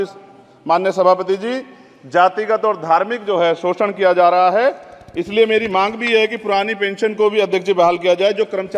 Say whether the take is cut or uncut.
uncut